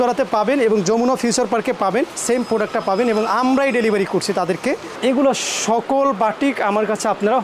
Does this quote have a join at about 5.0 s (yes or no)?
yes